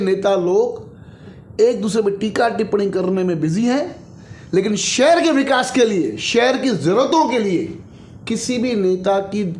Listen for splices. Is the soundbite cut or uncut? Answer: uncut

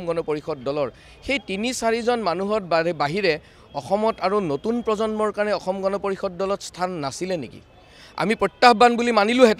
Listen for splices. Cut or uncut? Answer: uncut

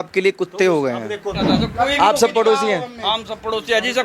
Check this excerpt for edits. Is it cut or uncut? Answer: cut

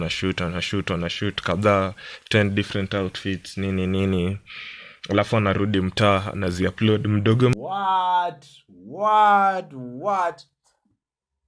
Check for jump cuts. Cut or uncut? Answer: uncut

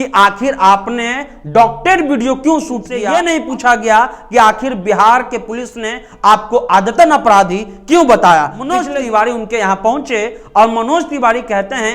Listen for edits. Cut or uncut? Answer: cut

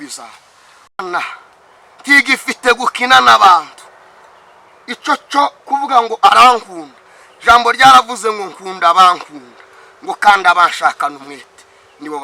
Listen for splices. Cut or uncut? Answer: cut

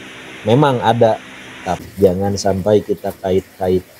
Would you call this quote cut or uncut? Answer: cut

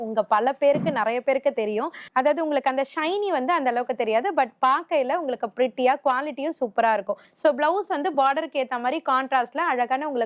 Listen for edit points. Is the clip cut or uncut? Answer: cut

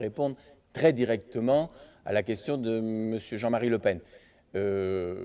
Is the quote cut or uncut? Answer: uncut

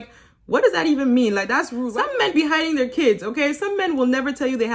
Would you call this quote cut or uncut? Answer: cut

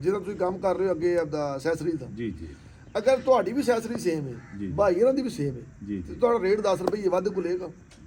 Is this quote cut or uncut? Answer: uncut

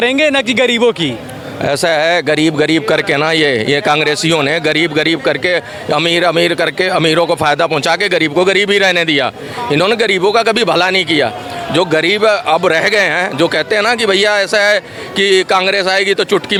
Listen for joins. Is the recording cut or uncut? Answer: uncut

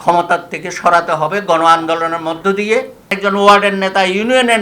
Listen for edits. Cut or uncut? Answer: cut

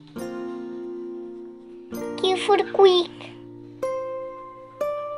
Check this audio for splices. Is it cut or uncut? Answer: uncut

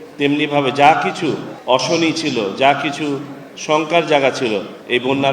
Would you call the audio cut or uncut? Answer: cut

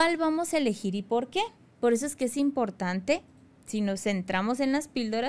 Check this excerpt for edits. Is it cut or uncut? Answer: uncut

